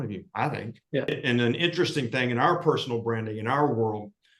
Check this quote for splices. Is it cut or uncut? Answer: cut